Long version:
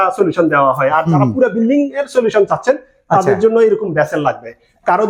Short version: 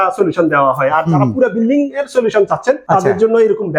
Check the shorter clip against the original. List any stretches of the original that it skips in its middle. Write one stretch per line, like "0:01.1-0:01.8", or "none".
0:02.8-0:03.0